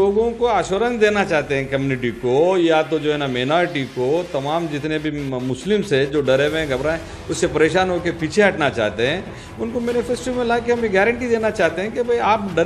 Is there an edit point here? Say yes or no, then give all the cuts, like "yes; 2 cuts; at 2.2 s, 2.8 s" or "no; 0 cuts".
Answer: no; 0 cuts